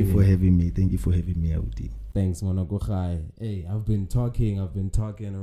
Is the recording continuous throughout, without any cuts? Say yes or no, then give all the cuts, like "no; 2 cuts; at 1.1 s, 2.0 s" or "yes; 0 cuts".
yes; 0 cuts